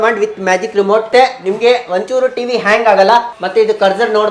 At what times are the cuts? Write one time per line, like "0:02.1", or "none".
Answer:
0:01.1
0:03.3